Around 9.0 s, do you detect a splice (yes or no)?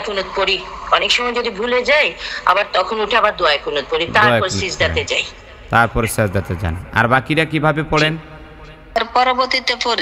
yes